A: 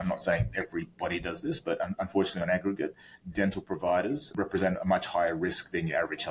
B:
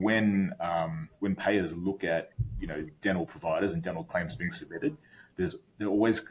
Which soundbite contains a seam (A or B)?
A